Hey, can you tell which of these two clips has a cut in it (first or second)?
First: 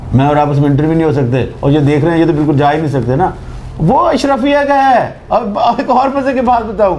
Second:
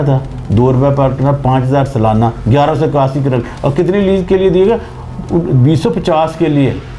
first